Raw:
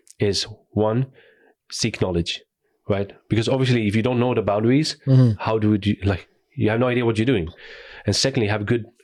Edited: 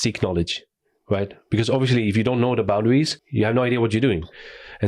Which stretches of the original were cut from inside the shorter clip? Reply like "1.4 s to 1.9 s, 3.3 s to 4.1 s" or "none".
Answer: 5.0 s to 6.4 s